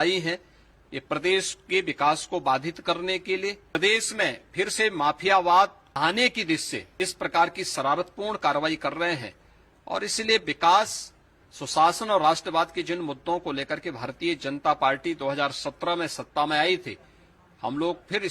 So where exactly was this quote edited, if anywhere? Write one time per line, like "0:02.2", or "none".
0:03.7
0:05.8
0:06.8